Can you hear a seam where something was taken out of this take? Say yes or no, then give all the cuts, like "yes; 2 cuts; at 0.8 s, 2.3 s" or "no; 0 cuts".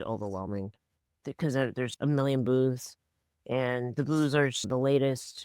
yes; 1 cut; at 1.9 s